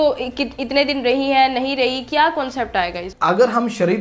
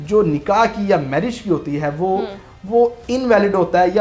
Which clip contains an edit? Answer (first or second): first